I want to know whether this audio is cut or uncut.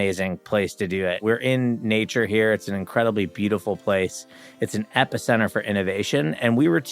cut